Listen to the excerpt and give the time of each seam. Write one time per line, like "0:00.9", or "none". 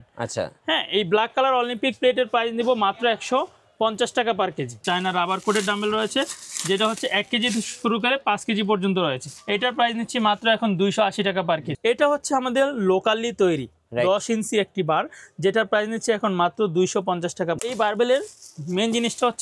0:04.8
0:09.3
0:11.7
0:17.6